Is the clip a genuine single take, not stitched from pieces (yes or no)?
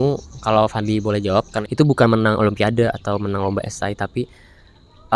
no